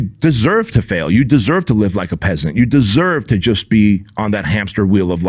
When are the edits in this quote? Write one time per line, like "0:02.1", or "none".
none